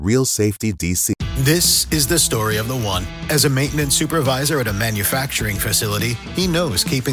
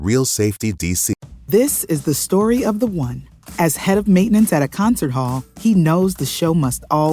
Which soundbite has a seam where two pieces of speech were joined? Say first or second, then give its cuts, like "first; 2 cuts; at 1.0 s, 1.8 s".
second; 1 cut; at 1.3 s